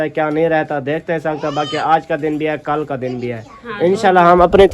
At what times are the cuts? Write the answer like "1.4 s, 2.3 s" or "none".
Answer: none